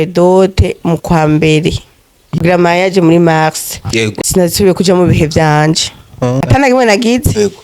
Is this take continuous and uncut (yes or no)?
no